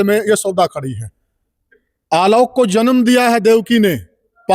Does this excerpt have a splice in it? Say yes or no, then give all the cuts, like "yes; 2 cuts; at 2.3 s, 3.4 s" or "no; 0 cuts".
no; 0 cuts